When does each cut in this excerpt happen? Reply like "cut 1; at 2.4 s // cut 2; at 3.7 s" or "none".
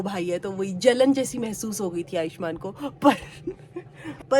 none